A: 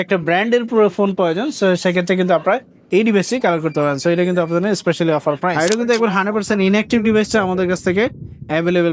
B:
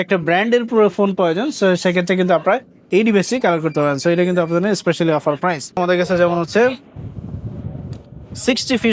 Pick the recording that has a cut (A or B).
A